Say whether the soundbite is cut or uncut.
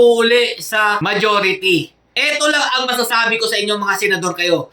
cut